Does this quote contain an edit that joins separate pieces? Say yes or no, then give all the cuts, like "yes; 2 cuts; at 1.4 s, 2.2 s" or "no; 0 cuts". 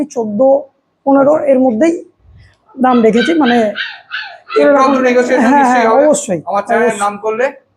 no; 0 cuts